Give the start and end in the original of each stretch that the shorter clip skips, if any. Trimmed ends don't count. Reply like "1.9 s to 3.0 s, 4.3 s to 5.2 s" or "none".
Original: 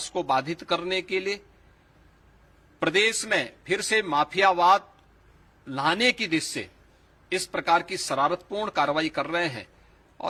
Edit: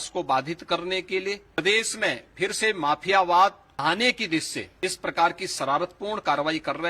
1.6 s to 2.9 s, 5.0 s to 5.7 s, 6.6 s to 7.1 s